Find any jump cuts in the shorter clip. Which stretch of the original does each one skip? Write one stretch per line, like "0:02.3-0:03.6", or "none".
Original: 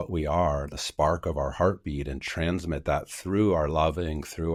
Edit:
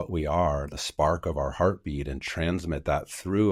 none